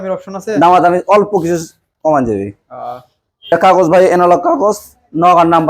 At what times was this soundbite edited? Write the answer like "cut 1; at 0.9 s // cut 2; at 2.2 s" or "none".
cut 1; at 3.5 s